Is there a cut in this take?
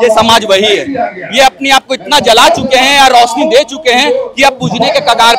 no; 0 cuts

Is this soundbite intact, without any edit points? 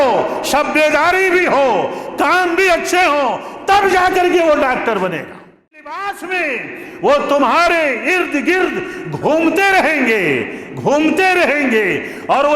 no; 1 cut; at 5.8 s

